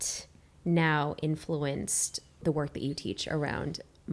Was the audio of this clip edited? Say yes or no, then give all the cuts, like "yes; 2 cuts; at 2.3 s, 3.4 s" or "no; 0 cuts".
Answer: yes; 1 cut; at 2.4 s